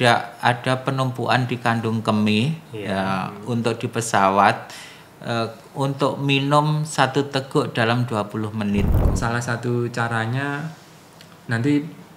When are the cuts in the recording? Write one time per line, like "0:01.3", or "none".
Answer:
0:09.0